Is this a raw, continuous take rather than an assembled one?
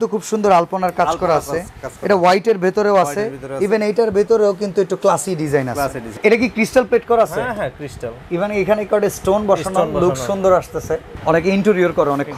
no; 2 cuts; at 6.2 s, 11.1 s

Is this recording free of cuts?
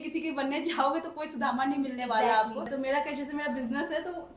no; 1 cut; at 2.7 s

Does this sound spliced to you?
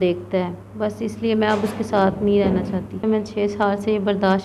yes; 1 cut; at 3.0 s

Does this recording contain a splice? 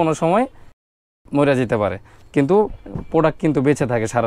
no; 0 cuts

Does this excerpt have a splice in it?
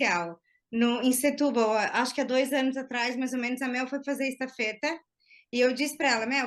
no; 0 cuts

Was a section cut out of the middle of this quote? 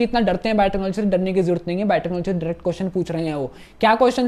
no; 0 cuts

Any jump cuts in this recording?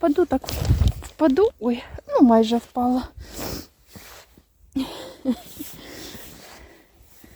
no; 0 cuts

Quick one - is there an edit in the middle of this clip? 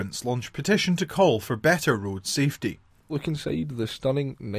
yes; 1 cut; at 2.9 s

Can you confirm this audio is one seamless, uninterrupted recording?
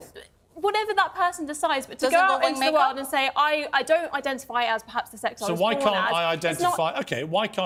yes; 0 cuts

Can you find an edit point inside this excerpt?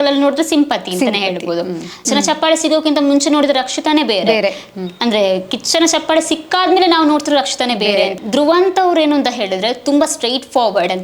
yes; 2 cuts; at 2.0 s, 8.2 s

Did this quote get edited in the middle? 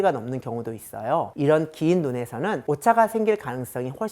yes; 1 cut; at 2.6 s

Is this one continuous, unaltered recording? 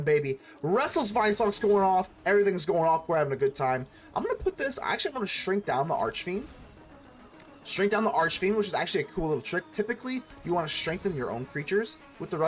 yes; 0 cuts

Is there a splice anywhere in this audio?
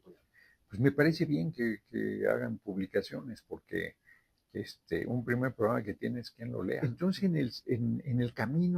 yes; 1 cut; at 6.8 s

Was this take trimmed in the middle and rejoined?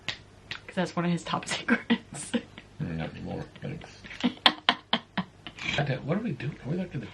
yes; 1 cut; at 5.8 s

